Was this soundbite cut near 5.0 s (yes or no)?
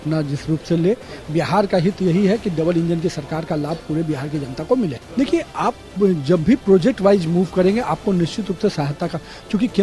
yes